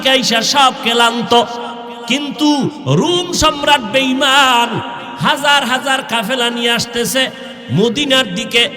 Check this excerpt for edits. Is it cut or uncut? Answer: uncut